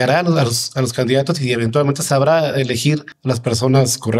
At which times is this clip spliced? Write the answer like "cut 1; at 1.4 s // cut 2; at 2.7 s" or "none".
cut 1; at 3.1 s